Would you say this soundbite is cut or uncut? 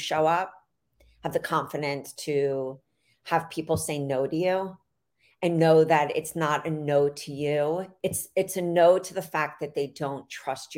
cut